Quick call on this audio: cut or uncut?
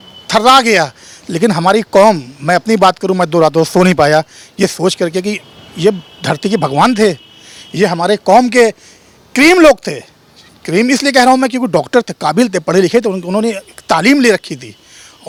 uncut